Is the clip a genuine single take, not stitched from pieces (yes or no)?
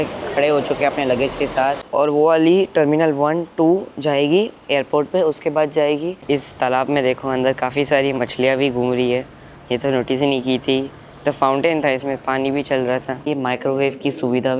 no